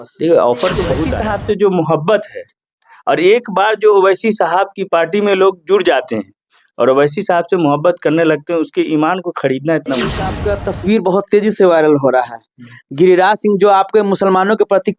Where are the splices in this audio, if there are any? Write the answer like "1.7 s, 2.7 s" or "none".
1.1 s, 10.4 s